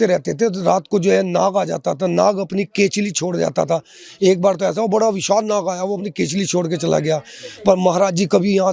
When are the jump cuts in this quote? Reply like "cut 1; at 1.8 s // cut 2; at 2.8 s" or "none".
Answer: none

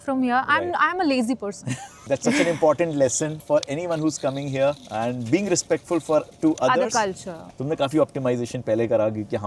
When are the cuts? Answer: cut 1; at 1.9 s // cut 2; at 7.4 s

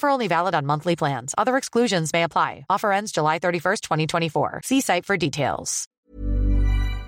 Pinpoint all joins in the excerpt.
cut 1; at 6.0 s

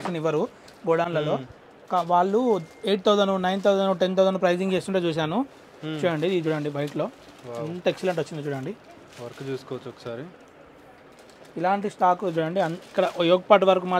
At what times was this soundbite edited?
none

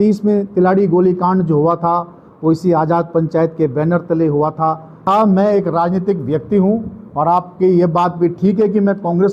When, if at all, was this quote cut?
cut 1; at 5.1 s

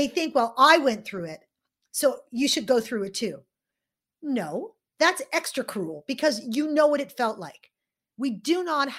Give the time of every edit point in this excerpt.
cut 1; at 8.0 s

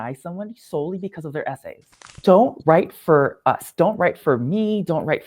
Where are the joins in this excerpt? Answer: cut 1; at 2.0 s // cut 2; at 3.7 s

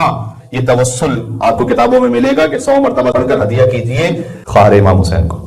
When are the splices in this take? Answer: cut 1; at 3.1 s // cut 2; at 4.3 s

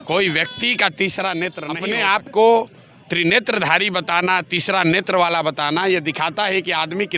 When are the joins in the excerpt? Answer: cut 1; at 1.7 s

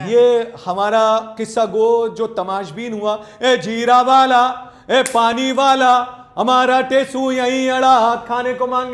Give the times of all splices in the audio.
none

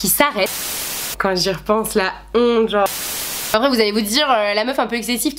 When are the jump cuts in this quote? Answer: cut 1; at 1.0 s // cut 2; at 3.3 s

